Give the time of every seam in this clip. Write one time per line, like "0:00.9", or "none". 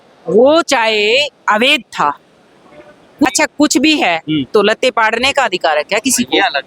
0:03.3

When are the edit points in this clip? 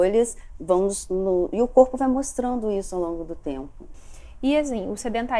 0:03.9

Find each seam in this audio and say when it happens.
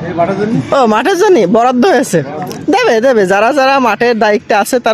none

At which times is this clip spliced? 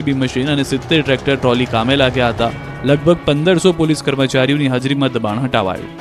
0:03.4

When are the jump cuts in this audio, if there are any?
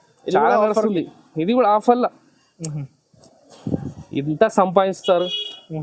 none

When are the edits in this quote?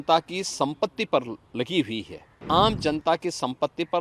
0:02.4

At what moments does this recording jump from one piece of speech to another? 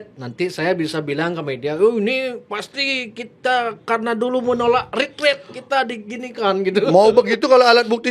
none

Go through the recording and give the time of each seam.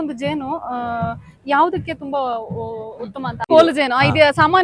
0:03.5

